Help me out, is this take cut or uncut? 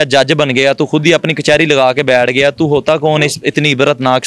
uncut